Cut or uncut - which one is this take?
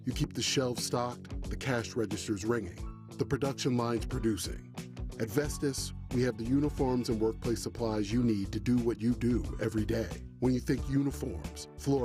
uncut